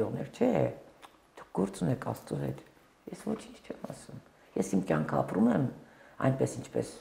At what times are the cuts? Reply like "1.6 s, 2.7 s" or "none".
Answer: none